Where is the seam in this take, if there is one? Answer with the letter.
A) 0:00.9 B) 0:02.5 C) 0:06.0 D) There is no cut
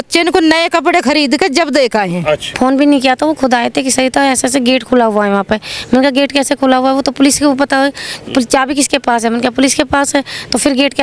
B